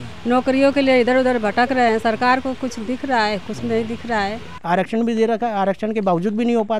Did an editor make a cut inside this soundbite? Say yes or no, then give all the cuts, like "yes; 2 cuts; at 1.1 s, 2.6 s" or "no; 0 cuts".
yes; 1 cut; at 4.5 s